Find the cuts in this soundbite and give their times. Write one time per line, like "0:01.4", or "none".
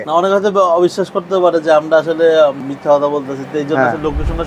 0:02.7